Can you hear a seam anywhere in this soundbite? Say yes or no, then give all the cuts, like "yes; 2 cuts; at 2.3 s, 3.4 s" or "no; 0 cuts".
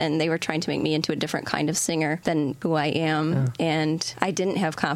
yes; 2 cuts; at 2.5 s, 3.6 s